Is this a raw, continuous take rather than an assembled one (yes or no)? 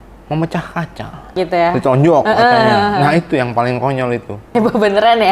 no